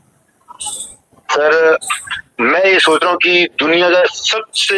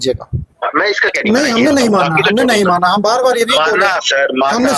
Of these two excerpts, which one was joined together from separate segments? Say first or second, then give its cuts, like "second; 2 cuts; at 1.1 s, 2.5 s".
second; 1 cut; at 1.1 s